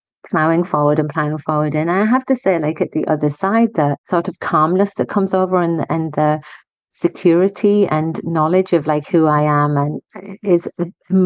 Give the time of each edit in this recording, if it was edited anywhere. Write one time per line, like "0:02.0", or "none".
0:04.0